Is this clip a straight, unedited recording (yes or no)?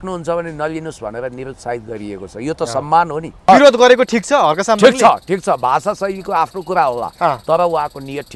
no